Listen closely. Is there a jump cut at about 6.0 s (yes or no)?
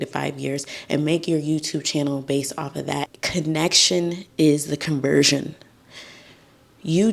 no